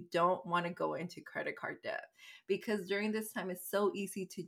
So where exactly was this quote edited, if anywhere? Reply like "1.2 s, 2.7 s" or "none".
none